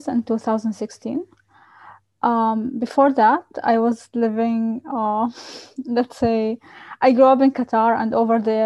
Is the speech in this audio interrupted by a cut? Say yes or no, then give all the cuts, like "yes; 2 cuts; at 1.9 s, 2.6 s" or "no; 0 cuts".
no; 0 cuts